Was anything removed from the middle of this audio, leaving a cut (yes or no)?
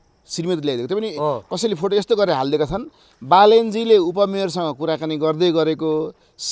no